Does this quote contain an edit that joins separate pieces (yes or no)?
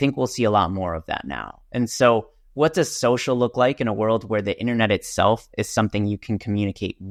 no